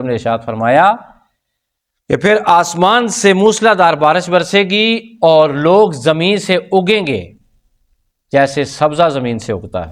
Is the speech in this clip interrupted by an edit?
no; 0 cuts

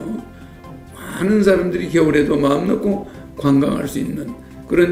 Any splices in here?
no; 0 cuts

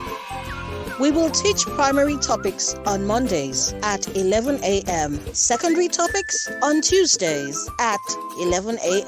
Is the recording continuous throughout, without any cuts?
yes; 0 cuts

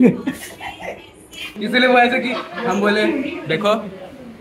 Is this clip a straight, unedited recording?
no; 1 cut; at 1.5 s

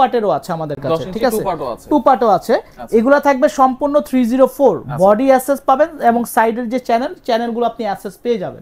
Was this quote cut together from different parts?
no; 0 cuts

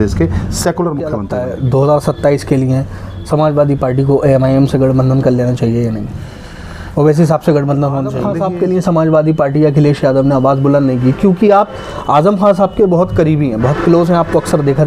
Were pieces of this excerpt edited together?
yes; 2 cuts; at 1.3 s, 8.2 s

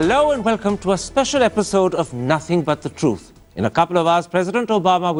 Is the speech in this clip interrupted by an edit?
no; 0 cuts

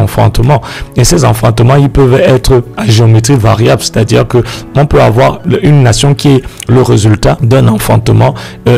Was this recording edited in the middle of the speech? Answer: yes; 2 cuts; at 5.4 s, 7.4 s

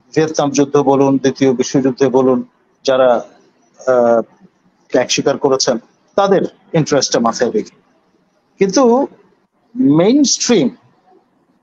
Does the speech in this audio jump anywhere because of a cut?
no; 0 cuts

